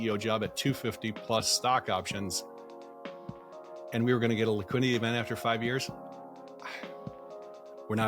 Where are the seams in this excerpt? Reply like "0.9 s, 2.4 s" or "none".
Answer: none